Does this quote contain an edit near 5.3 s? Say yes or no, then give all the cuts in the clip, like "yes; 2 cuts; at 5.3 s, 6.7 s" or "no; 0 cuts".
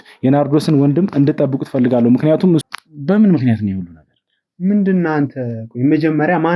no; 1 cut; at 2.6 s